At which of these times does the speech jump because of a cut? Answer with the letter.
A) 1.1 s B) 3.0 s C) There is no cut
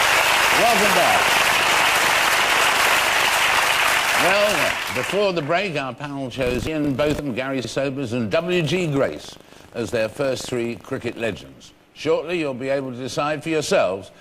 A